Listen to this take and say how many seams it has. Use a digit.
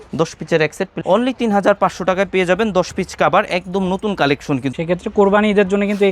2